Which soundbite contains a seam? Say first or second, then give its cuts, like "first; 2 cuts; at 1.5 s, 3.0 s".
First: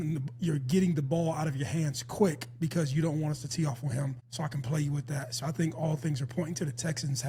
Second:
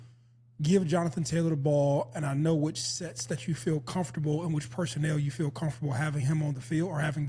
first; 1 cut; at 4.2 s